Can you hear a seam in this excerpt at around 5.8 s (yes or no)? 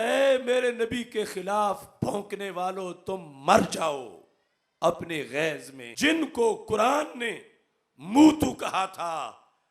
yes